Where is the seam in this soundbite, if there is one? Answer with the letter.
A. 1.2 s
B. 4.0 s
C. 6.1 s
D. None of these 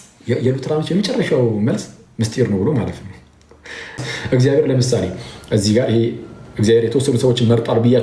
B